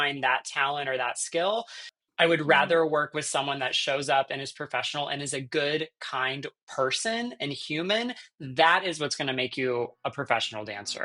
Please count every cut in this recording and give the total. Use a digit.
1